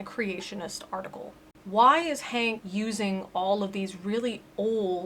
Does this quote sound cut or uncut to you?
cut